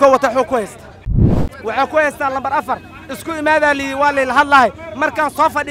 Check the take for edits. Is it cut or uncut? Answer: cut